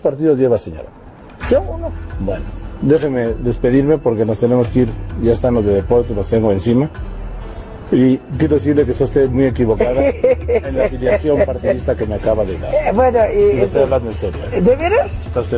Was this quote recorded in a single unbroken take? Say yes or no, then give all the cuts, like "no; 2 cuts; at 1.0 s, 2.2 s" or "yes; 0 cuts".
yes; 0 cuts